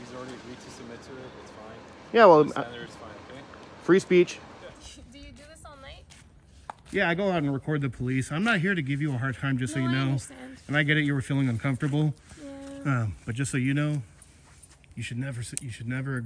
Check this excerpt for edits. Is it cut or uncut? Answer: cut